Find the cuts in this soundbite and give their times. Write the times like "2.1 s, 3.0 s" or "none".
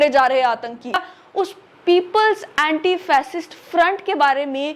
1.2 s